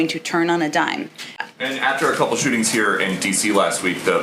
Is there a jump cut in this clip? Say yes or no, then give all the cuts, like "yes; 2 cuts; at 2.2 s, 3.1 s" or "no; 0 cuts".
yes; 1 cut; at 1.4 s